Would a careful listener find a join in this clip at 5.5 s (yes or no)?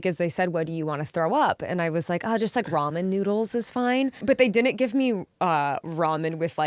no